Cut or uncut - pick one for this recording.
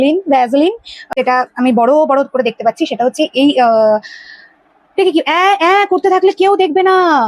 cut